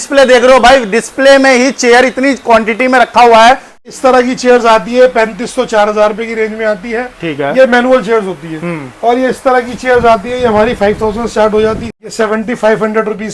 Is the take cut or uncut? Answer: cut